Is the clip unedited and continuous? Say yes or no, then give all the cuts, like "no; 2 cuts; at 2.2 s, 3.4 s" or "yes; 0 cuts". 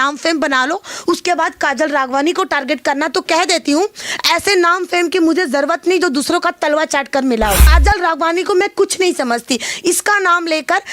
no; 1 cut; at 7.7 s